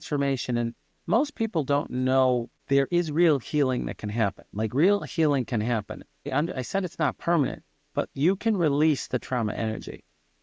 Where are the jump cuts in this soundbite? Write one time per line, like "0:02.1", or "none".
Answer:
0:02.6
0:06.1